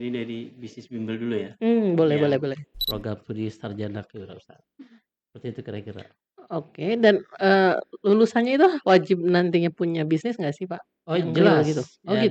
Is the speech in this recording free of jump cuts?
no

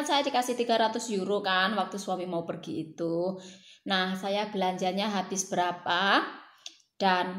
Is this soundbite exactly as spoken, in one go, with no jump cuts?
yes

